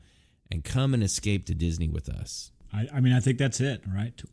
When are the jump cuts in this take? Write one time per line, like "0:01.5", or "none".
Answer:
0:02.6